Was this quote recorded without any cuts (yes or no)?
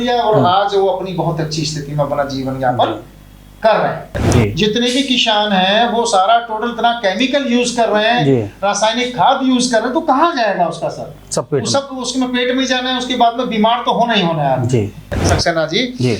no